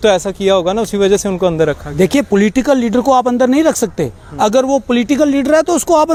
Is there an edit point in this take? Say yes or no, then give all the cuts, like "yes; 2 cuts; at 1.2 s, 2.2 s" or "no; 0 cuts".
no; 0 cuts